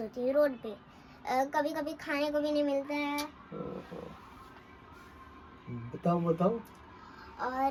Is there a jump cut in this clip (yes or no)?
no